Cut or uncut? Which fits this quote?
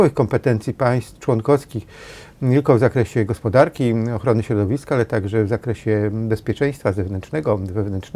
uncut